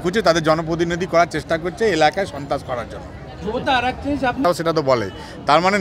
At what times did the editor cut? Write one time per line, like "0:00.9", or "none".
0:04.5